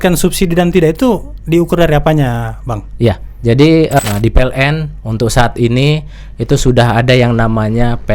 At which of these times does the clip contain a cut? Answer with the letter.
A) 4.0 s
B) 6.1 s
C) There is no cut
A